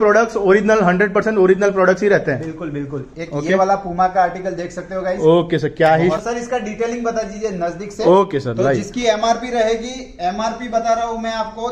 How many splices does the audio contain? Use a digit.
1